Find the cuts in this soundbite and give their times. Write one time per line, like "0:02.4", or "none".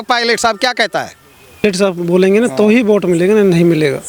0:01.6